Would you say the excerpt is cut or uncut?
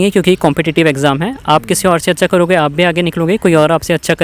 uncut